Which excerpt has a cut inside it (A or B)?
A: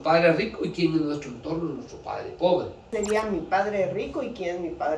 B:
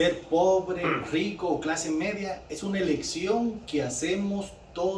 A